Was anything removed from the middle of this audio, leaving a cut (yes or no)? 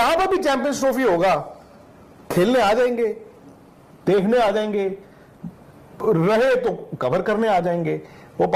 no